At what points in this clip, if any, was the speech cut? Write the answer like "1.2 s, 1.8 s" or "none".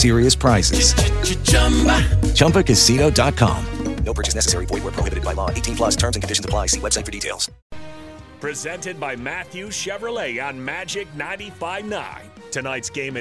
8.0 s